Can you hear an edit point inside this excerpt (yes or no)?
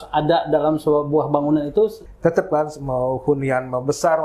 yes